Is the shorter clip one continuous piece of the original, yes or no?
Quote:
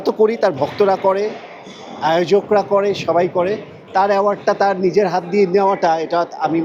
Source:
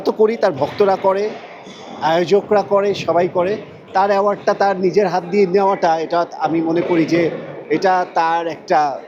yes